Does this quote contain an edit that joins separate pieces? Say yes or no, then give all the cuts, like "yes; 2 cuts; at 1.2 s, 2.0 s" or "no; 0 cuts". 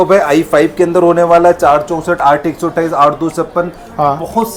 no; 0 cuts